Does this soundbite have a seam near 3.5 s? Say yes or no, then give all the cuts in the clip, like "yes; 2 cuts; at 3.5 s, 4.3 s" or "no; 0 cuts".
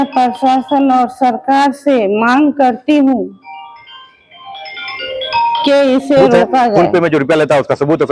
no; 1 cut; at 6.9 s